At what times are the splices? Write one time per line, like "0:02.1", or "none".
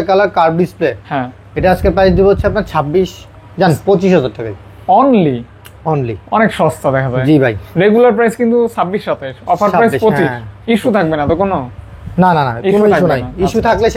none